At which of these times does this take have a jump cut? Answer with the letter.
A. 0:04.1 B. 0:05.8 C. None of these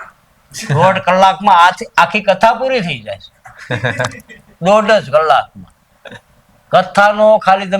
C